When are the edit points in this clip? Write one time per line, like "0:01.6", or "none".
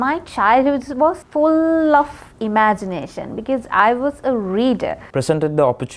0:01.2
0:05.0